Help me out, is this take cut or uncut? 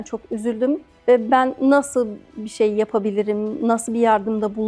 cut